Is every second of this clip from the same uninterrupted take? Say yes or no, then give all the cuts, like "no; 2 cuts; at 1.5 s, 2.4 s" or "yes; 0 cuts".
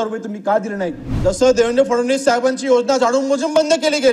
no; 1 cut; at 1.0 s